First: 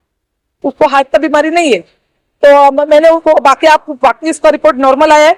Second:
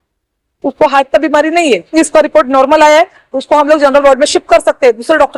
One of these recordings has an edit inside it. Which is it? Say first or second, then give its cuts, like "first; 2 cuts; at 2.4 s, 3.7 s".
second; 1 cut; at 1.9 s